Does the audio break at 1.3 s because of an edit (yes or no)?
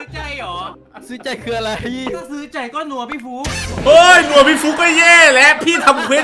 no